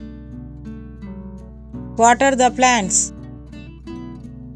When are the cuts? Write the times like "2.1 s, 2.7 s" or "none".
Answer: none